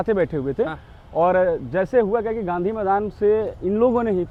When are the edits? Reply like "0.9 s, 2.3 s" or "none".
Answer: none